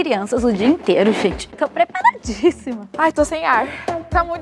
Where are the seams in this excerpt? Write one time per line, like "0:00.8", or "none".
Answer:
0:02.8